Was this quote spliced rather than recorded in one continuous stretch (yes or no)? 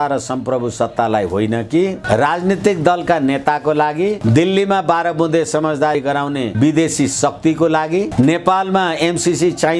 yes